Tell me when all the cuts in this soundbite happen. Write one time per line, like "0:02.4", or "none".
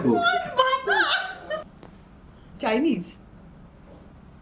0:01.7